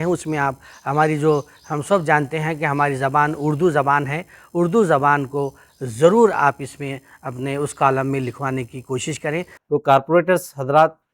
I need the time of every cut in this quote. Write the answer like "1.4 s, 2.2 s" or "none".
9.6 s